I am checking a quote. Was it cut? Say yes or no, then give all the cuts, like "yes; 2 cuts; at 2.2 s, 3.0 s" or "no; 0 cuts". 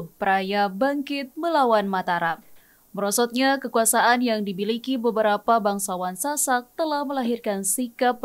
no; 0 cuts